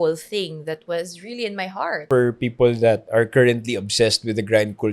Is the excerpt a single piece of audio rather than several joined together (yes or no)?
no